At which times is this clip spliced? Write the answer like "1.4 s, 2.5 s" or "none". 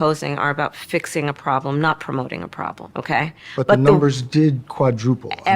2.8 s

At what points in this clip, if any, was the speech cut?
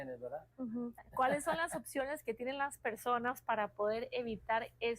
1.0 s

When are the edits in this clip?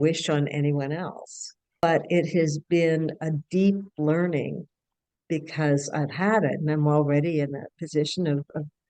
1.8 s

